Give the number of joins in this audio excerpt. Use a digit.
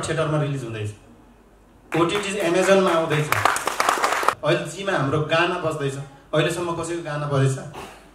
1